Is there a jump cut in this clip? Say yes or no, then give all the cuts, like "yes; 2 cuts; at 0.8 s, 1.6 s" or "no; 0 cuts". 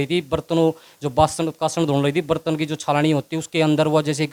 no; 0 cuts